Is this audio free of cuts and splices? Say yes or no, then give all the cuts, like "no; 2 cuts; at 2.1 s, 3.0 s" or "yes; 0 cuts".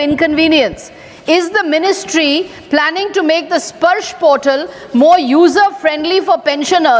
yes; 0 cuts